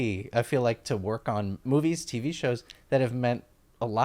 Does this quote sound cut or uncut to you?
cut